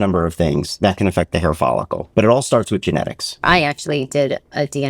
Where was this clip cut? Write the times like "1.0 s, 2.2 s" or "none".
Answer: 2.0 s, 3.4 s